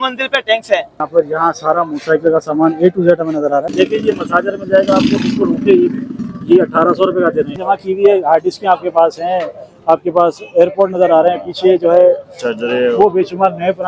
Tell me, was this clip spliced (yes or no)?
yes